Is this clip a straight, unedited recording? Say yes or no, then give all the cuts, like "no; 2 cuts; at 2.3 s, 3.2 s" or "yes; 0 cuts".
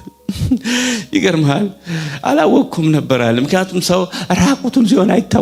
yes; 0 cuts